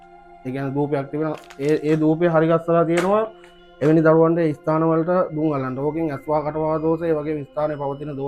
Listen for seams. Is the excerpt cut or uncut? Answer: uncut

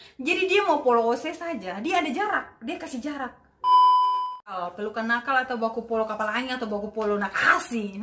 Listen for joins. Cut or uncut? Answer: cut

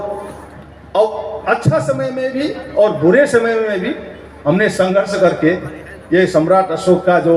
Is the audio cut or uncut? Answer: uncut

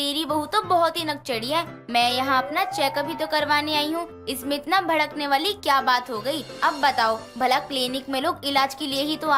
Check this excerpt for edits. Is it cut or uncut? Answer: uncut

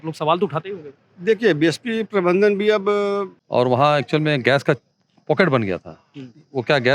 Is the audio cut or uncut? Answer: cut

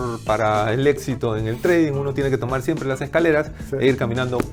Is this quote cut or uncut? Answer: uncut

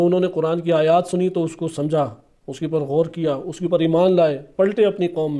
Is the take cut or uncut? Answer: uncut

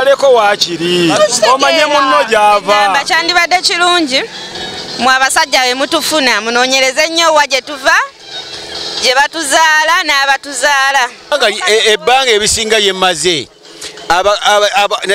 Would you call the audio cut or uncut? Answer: cut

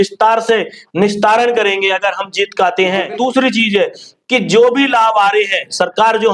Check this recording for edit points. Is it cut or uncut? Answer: cut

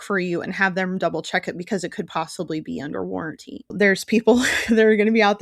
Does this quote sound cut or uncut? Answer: cut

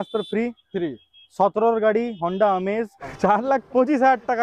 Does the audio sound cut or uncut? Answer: cut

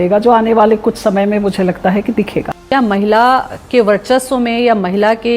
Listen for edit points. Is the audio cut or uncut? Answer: cut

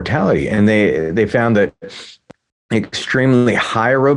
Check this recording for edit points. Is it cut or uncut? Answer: uncut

